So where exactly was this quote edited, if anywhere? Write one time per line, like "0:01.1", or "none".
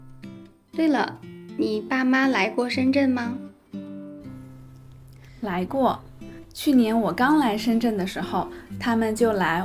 none